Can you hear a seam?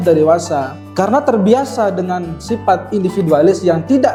no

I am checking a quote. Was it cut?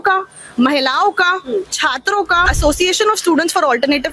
yes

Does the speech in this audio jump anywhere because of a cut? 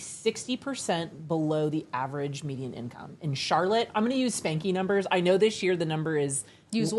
no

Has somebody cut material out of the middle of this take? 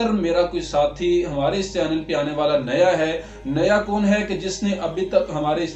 no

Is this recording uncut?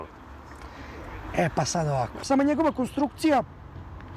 no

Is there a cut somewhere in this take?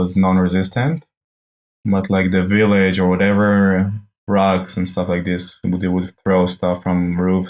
no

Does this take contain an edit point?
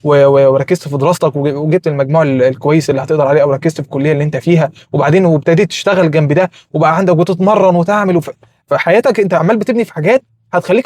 no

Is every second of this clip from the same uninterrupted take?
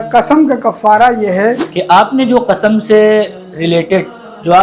no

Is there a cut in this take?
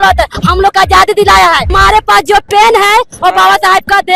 yes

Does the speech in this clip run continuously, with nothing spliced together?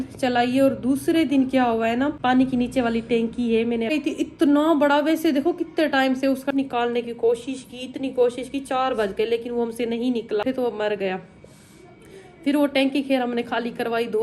no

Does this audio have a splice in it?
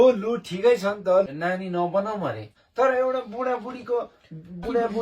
yes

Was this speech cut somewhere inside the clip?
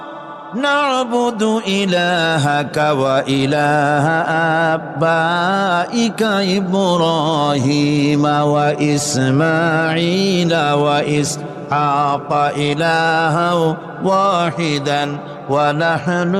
no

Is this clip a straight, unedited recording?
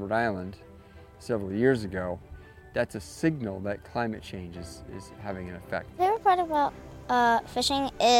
no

